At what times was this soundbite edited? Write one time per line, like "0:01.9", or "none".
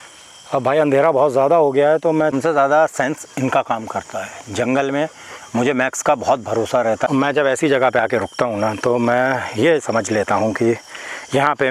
0:02.4
0:07.1